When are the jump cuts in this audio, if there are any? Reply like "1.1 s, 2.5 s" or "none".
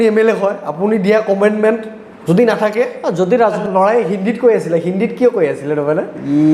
3.6 s